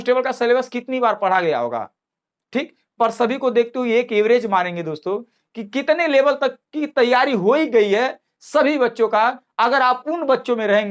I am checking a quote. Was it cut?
no; 0 cuts

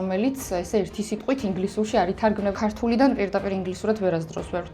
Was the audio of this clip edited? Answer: yes; 1 cut; at 2.5 s

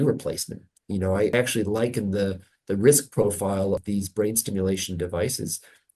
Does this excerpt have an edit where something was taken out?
yes; 2 cuts; at 1.3 s, 3.8 s

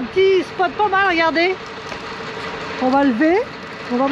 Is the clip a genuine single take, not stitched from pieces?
yes; 0 cuts

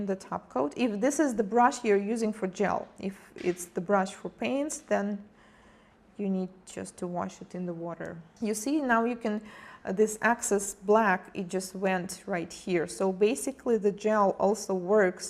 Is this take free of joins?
no; 1 cut; at 2.4 s

